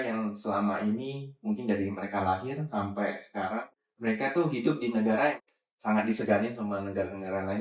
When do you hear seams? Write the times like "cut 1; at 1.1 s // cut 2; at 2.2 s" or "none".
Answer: cut 1; at 3.7 s // cut 2; at 5.4 s